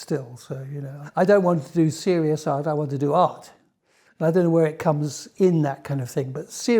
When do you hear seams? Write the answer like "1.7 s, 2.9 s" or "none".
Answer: 1.0 s